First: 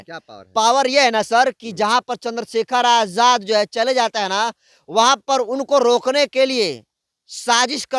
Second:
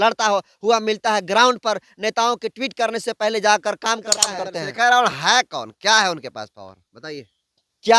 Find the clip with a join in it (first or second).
second